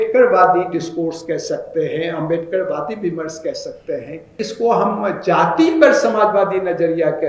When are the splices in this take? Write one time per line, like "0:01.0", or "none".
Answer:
0:04.4